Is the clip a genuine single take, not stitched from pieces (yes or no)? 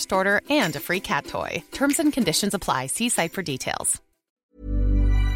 no